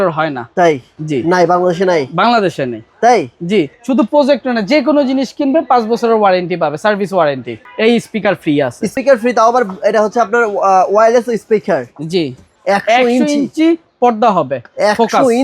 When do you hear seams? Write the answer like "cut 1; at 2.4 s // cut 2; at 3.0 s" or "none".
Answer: cut 1; at 3.7 s // cut 2; at 7.5 s // cut 3; at 8.9 s // cut 4; at 12.5 s

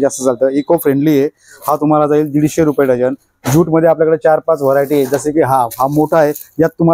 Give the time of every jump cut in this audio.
none

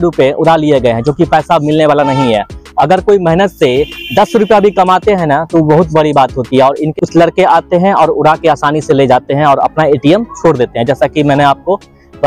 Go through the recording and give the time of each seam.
none

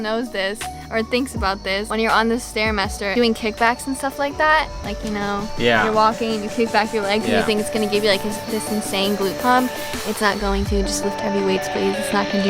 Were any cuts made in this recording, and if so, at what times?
cut 1; at 1.9 s // cut 2; at 3.1 s

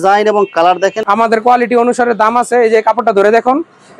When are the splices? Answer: cut 1; at 1.0 s

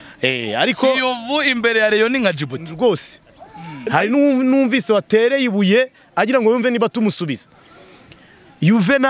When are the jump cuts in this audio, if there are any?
cut 1; at 3.5 s

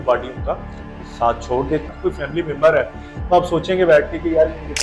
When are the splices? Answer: cut 1; at 1.9 s

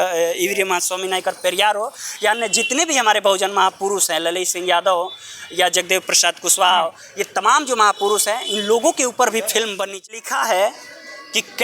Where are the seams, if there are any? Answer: cut 1; at 10.0 s

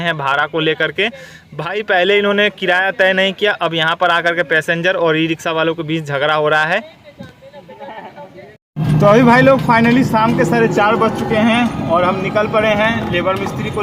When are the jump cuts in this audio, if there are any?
none

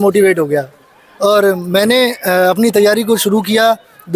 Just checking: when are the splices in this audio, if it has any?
none

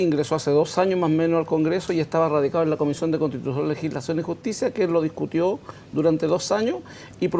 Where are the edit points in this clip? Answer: cut 1; at 3.5 s

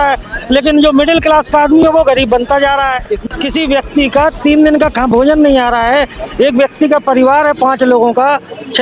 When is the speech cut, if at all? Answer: cut 1; at 3.2 s

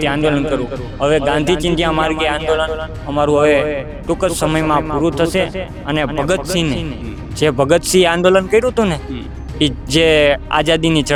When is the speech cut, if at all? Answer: none

